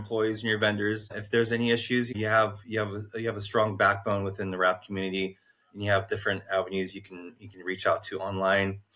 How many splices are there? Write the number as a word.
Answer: two